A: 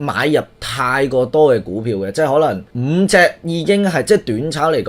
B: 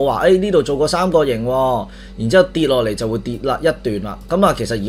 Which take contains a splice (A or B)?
A